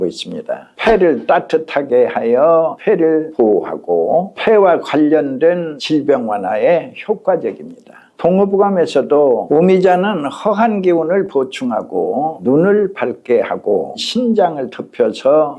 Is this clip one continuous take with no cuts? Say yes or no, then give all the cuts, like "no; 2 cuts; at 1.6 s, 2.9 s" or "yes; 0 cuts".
yes; 0 cuts